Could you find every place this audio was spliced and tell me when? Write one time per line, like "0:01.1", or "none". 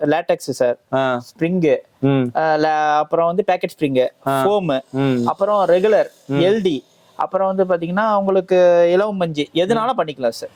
none